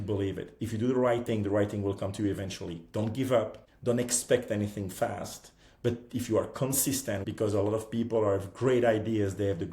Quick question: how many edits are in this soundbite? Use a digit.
2